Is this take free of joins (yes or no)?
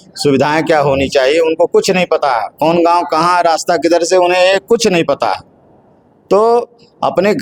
yes